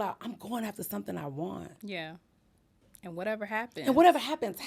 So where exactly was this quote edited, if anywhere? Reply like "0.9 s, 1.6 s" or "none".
none